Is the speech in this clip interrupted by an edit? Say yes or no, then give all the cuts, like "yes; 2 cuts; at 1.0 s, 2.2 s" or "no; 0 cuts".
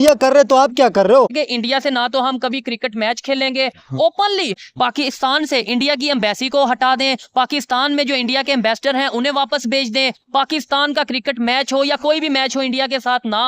yes; 2 cuts; at 1.3 s, 4.6 s